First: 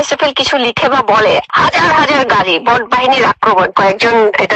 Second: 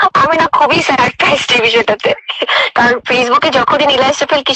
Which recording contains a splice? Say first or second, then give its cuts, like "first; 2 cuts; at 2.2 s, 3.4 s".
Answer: first; 2 cuts; at 1.5 s, 3.7 s